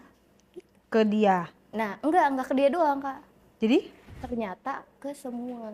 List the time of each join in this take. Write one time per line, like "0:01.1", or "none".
0:04.2